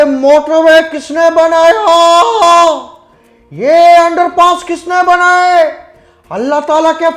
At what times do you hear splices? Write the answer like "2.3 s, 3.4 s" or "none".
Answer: none